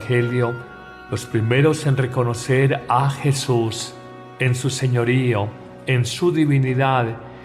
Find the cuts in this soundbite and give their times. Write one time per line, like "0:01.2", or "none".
0:05.7